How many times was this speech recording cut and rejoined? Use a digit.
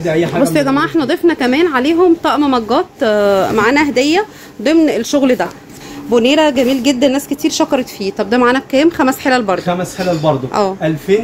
1